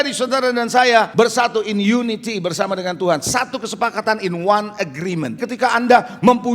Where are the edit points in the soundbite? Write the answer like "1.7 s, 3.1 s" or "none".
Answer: 1.1 s, 5.4 s